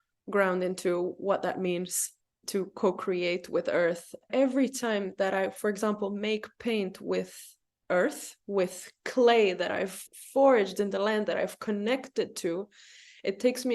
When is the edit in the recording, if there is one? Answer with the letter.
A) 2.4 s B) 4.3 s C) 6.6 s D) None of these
B